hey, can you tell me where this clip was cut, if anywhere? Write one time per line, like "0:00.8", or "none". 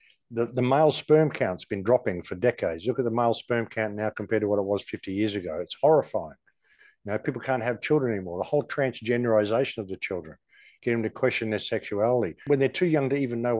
0:12.4